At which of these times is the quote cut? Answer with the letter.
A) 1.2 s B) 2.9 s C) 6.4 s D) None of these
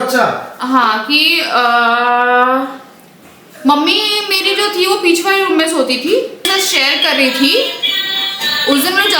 C